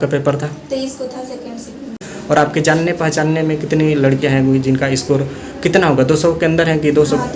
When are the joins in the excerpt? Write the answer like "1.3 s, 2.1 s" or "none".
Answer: 2.1 s